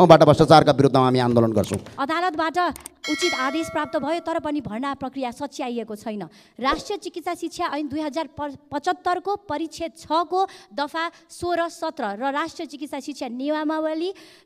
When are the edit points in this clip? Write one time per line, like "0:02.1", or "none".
0:01.8